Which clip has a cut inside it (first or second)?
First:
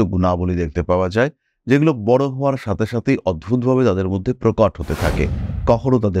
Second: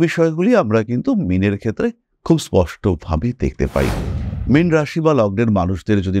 second